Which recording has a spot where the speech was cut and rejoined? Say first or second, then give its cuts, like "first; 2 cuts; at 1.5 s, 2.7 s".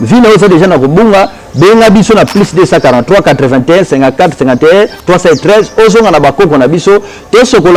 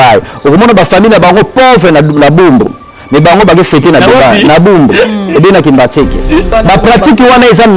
second; 1 cut; at 6.5 s